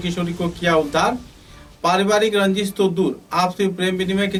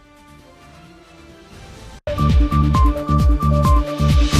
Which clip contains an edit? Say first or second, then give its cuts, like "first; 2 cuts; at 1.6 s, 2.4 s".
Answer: second; 1 cut; at 2.0 s